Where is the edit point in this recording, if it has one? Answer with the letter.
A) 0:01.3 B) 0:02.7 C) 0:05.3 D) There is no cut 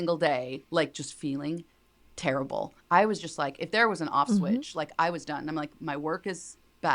B